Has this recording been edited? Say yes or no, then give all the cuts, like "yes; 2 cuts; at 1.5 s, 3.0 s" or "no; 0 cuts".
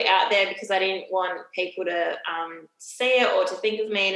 no; 0 cuts